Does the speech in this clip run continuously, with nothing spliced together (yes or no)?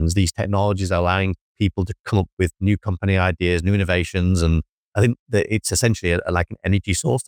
yes